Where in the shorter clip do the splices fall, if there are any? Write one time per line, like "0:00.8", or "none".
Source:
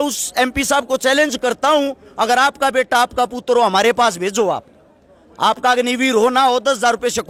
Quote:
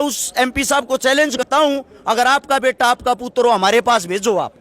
0:01.4